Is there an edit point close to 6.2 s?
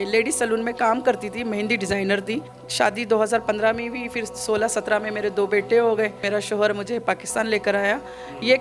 yes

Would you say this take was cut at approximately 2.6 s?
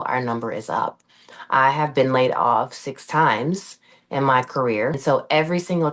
no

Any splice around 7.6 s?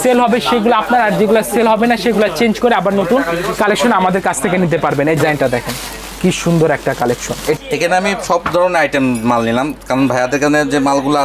yes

